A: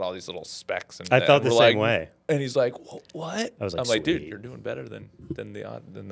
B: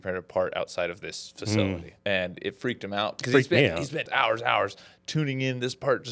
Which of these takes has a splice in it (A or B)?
B